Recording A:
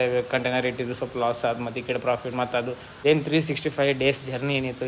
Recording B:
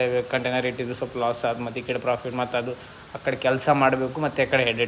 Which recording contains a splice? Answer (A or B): A